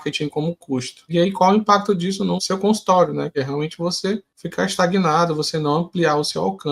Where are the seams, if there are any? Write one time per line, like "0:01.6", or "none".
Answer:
0:01.1
0:02.4
0:03.4
0:04.4